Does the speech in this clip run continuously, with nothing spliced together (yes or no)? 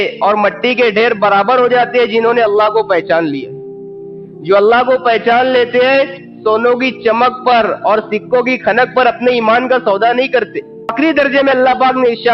no